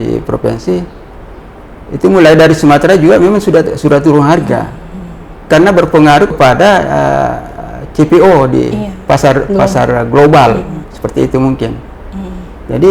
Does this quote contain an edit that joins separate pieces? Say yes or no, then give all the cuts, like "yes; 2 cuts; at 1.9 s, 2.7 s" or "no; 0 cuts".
no; 0 cuts